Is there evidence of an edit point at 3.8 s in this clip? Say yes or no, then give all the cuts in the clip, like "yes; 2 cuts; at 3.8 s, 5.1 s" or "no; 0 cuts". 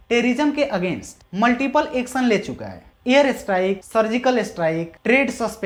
no; 0 cuts